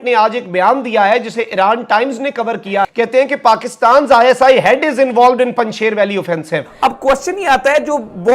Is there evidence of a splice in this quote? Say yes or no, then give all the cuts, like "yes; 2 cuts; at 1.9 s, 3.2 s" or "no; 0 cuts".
yes; 2 cuts; at 2.8 s, 6.7 s